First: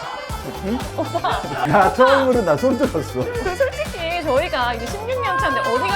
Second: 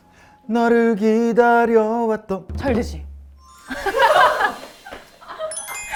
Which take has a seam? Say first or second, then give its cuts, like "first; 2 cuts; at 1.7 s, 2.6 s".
first; 2 cuts; at 1.7 s, 3.4 s